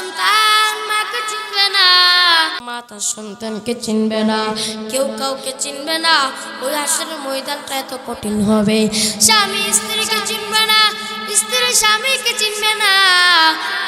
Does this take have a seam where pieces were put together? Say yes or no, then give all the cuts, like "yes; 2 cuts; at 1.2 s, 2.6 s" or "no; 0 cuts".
yes; 1 cut; at 2.6 s